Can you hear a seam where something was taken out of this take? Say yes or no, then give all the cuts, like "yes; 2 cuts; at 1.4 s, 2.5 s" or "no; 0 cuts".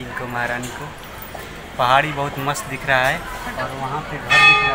no; 0 cuts